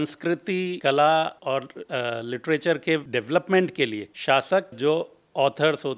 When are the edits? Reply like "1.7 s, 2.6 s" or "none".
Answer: 0.8 s, 1.4 s, 3.1 s, 4.1 s, 4.8 s